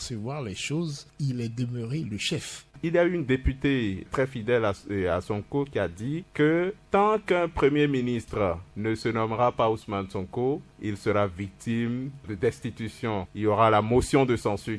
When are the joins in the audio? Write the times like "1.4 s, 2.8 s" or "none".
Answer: 2.8 s, 4.0 s